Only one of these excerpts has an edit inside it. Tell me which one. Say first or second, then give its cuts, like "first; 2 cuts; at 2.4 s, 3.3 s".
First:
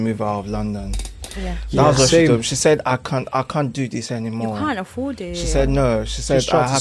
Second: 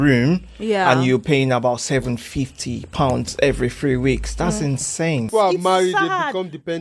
second; 1 cut; at 5.3 s